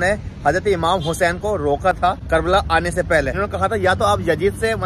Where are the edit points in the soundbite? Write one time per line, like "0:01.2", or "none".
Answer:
0:02.2
0:03.3